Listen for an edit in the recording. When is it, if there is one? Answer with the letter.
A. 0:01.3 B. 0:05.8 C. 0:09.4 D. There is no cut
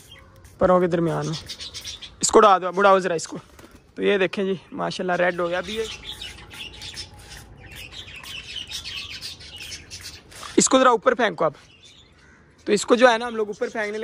B